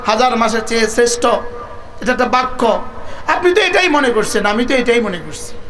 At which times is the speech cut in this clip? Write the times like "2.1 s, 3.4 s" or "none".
none